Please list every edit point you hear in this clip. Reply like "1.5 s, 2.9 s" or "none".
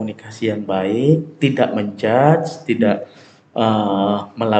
none